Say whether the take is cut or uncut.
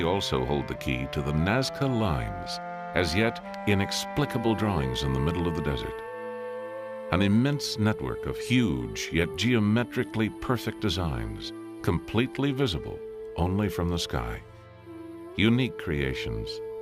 cut